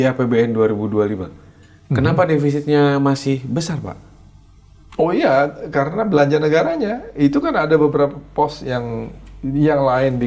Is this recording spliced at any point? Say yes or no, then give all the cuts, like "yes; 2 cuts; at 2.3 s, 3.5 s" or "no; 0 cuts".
no; 0 cuts